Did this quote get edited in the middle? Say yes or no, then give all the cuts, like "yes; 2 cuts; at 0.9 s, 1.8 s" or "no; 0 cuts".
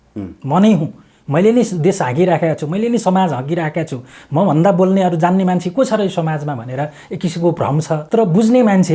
yes; 1 cut; at 8.0 s